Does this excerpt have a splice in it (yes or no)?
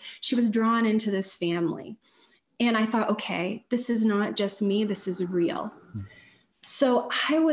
no